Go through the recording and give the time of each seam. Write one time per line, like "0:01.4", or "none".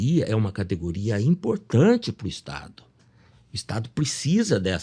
none